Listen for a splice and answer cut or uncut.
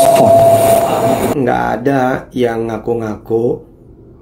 cut